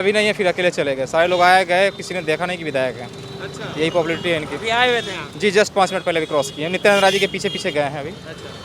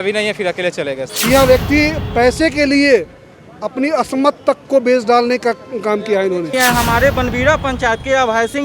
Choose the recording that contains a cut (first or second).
second